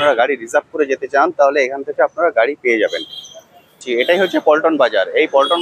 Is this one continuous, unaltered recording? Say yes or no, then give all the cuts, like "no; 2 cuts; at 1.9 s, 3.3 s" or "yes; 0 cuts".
no; 1 cut; at 3.8 s